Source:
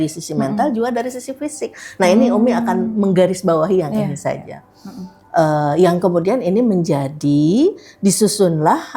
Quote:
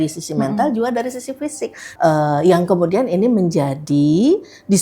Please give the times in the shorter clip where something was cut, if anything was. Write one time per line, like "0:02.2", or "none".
0:01.8